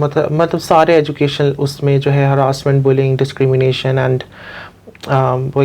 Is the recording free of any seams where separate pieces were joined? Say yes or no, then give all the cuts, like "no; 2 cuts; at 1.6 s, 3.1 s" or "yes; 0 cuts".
yes; 0 cuts